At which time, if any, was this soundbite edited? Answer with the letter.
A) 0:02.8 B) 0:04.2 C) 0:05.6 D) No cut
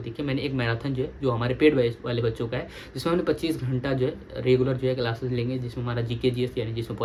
D